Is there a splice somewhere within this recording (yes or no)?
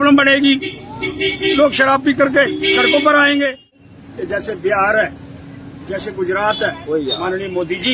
yes